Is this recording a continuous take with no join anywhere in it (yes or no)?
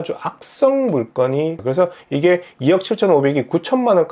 no